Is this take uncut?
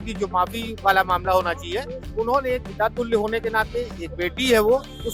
yes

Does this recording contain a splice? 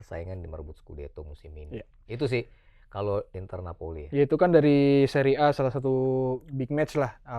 no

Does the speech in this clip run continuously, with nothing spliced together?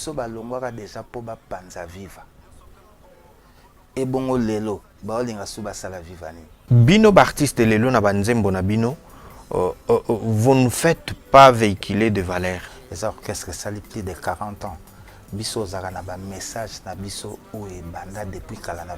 no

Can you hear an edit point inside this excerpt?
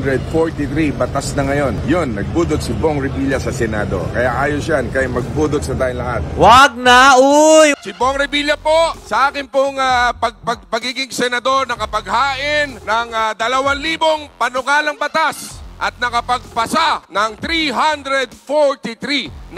yes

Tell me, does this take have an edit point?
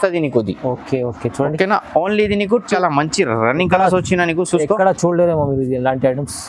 yes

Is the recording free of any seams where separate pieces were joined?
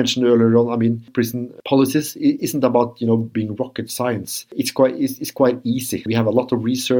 no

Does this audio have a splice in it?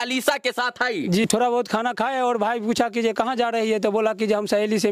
yes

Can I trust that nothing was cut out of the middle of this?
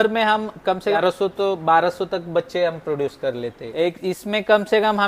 no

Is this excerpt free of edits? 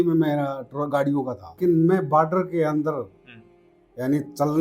no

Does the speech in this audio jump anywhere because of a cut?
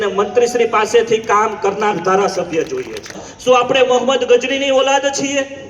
yes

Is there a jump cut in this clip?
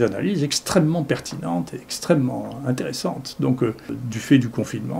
yes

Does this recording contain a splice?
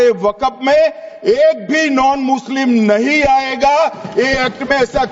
no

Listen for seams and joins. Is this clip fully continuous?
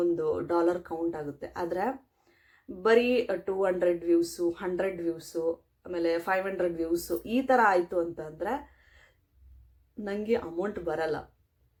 yes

